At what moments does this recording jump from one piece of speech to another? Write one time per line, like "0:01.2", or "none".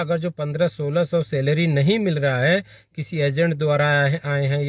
none